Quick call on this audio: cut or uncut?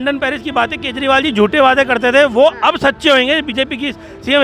uncut